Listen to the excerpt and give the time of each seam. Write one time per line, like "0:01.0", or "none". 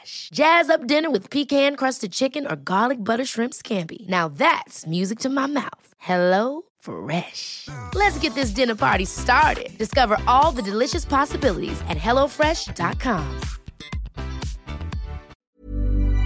0:15.3

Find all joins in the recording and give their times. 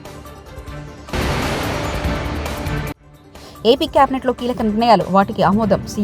0:01.1
0:03.1

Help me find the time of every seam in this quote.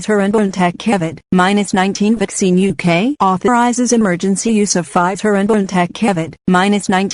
0:02.4

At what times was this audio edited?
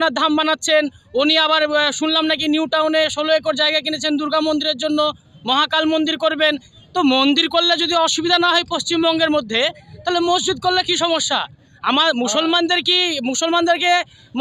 none

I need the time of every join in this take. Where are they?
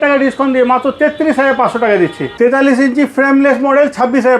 0:02.3

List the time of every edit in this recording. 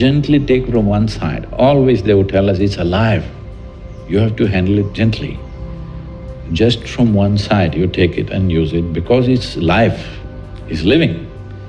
none

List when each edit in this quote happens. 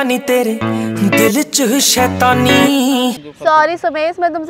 0:03.3

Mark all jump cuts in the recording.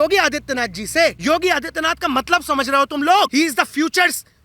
0:01.2
0:03.3

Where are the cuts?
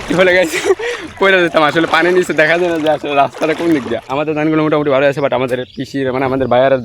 0:04.1

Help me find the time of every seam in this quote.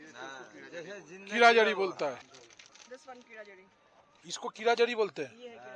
0:02.2

